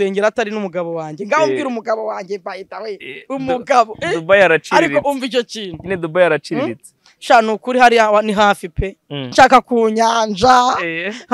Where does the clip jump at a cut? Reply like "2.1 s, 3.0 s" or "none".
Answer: 9.3 s